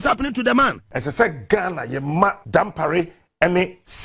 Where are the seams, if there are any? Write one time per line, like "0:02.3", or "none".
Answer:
0:00.9
0:02.4